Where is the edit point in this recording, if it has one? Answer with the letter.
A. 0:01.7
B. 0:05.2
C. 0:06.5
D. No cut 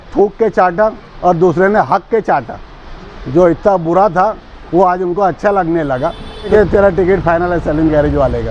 C